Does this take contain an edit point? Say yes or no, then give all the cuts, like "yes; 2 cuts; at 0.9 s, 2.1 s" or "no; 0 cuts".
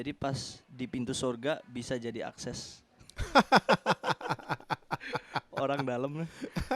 no; 0 cuts